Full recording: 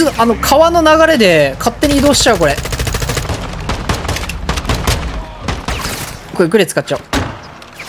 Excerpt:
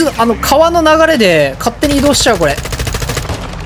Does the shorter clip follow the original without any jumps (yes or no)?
yes